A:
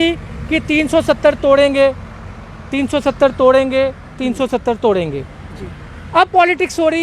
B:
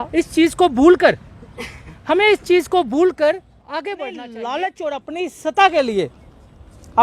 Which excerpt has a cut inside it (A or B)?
B